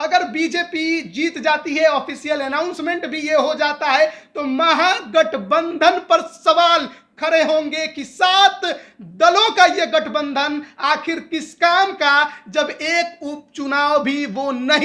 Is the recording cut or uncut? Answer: uncut